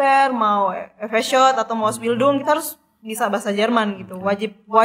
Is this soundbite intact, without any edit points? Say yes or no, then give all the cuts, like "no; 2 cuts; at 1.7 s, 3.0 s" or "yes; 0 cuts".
yes; 0 cuts